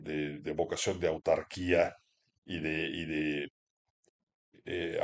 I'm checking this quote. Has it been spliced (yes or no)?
no